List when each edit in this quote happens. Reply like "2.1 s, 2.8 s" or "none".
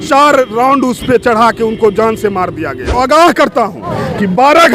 2.9 s